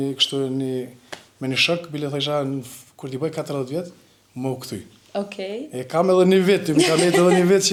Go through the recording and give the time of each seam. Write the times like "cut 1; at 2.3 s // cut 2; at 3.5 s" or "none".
none